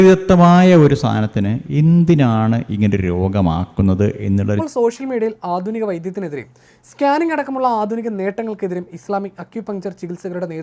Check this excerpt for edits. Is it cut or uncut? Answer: cut